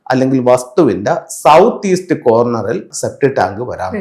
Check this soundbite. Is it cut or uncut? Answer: cut